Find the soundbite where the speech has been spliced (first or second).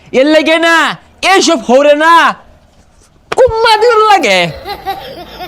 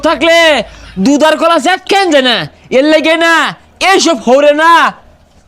first